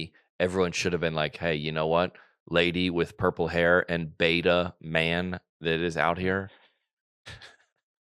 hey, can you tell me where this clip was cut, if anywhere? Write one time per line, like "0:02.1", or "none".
none

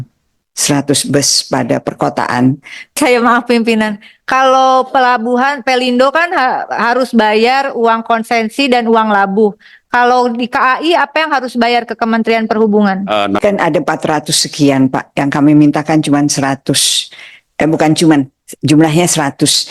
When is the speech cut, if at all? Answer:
0:03.0
0:13.4

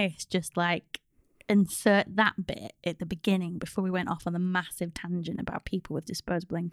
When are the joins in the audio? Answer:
none

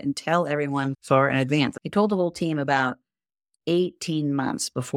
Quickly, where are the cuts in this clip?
0:01.8

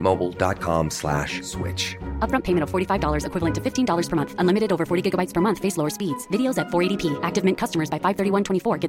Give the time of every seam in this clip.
none

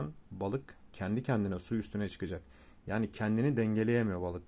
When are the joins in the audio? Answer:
none

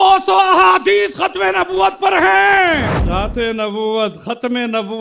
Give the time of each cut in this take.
0:03.0

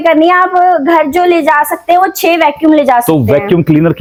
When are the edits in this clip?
none

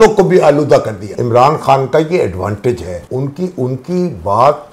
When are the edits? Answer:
0:01.2
0:03.0

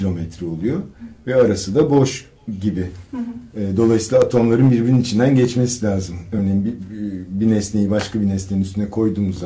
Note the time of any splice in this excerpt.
0:01.5

